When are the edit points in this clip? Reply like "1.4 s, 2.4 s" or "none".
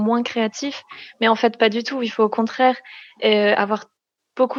none